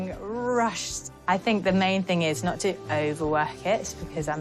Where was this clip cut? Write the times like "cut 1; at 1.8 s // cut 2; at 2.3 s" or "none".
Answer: none